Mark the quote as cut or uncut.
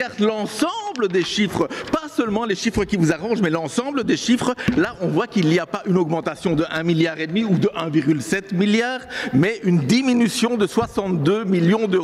uncut